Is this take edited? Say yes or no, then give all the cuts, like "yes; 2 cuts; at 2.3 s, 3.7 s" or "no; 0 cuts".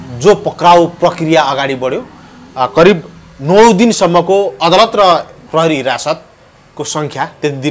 no; 0 cuts